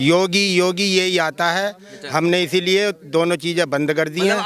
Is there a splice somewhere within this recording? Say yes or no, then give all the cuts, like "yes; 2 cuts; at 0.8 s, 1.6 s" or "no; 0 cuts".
no; 0 cuts